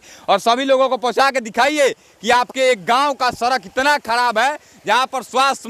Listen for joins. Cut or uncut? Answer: uncut